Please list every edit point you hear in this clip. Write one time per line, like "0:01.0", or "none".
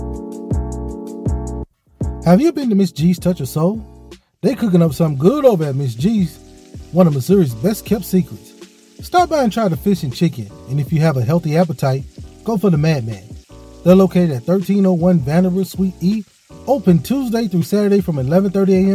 none